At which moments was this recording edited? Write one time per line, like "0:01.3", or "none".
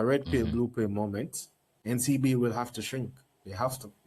0:01.6